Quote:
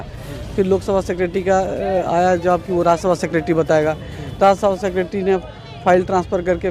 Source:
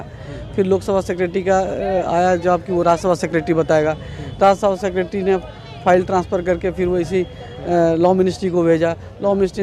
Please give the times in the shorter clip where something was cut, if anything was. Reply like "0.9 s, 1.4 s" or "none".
none

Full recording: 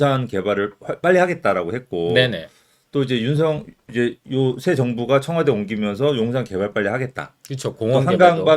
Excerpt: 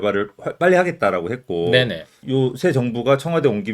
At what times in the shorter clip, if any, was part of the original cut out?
2.2 s

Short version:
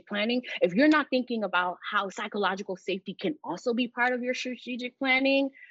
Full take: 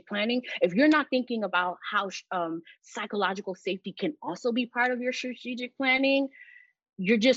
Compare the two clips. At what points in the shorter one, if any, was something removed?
2.2 s

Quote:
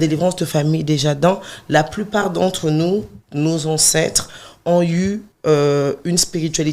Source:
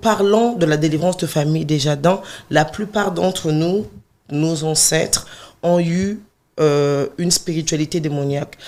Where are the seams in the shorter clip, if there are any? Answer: 3.2 s, 5.3 s

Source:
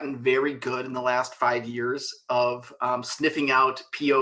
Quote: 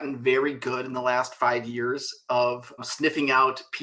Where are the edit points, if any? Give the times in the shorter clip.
2.8 s

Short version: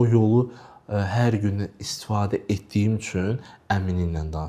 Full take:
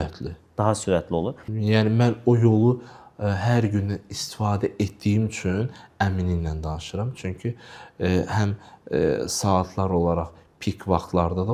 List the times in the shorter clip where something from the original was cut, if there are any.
none

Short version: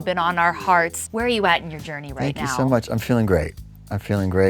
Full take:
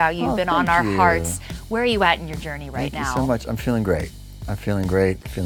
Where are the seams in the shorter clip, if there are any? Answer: 1.0 s

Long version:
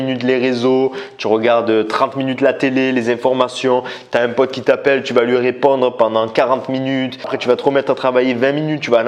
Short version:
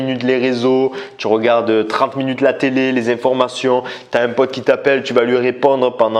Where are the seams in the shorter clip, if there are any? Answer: none

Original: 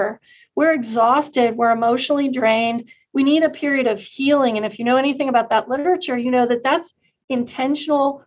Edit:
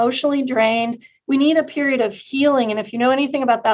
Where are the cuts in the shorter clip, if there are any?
none

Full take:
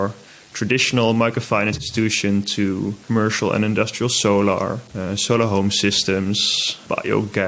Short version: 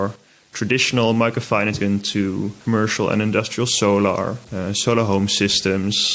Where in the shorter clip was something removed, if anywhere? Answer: 1.8 s

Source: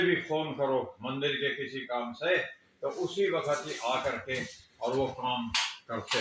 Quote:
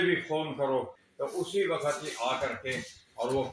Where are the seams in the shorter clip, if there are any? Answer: 1.0 s

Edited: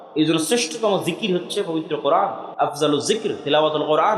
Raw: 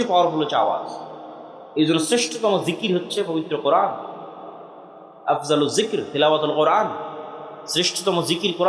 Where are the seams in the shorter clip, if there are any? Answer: 2.4 s

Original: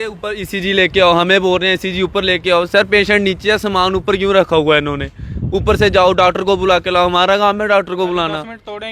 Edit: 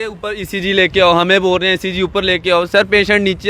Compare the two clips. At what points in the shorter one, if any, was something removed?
none

